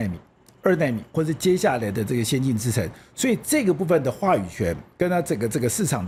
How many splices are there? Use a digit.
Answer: 0